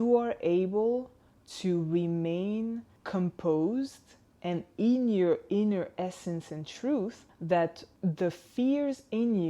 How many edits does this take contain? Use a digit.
3